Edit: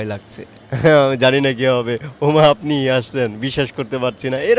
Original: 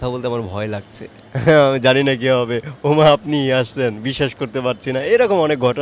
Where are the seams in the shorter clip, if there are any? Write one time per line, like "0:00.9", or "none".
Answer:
none